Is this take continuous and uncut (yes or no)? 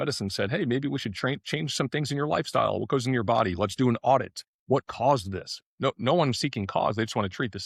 yes